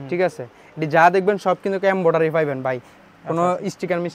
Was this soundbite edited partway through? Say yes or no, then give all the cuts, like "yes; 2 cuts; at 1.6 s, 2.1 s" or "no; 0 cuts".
no; 0 cuts